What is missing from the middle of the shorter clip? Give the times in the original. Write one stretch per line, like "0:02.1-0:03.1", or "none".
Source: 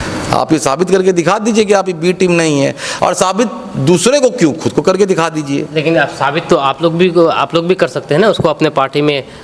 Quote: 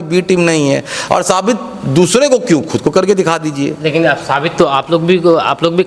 none